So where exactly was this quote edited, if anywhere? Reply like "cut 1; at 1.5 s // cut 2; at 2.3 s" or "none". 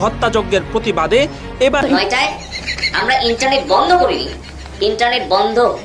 cut 1; at 1.8 s